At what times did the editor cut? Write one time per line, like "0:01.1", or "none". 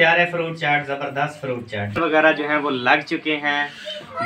0:01.9